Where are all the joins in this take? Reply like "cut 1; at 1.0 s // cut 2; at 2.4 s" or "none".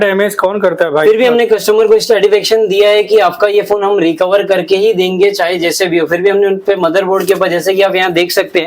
none